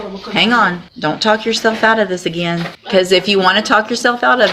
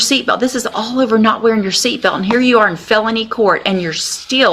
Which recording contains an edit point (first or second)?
first